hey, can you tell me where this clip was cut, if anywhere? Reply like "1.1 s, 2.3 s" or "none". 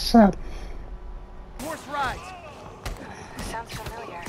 1.6 s